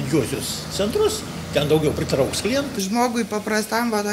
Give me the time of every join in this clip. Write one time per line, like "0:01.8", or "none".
0:02.7